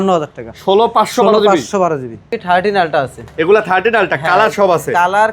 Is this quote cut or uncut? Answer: cut